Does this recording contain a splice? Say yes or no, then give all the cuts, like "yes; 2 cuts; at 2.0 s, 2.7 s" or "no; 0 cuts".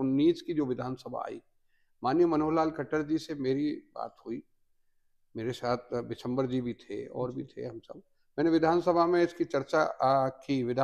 no; 0 cuts